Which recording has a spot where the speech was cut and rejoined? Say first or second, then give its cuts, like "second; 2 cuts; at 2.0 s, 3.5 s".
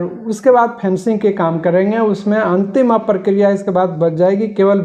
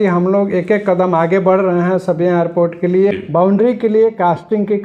second; 1 cut; at 3.2 s